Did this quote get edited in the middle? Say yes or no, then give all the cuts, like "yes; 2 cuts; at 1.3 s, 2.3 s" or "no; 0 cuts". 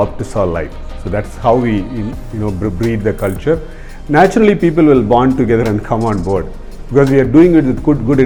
no; 0 cuts